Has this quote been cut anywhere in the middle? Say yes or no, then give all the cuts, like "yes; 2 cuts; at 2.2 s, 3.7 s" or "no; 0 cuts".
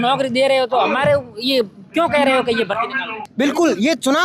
yes; 1 cut; at 3.2 s